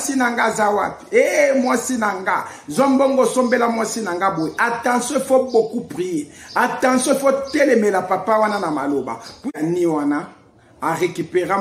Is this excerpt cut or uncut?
cut